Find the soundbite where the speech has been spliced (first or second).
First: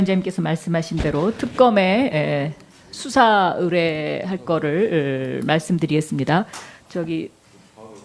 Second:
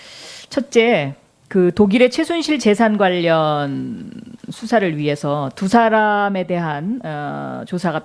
second